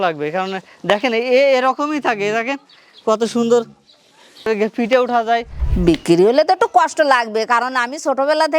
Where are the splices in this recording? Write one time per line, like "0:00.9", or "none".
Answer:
0:05.6